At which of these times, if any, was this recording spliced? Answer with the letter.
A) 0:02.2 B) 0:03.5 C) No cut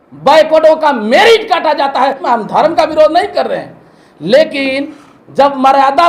A